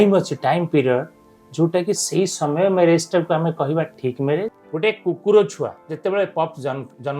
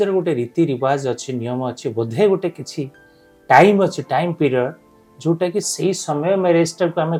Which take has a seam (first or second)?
first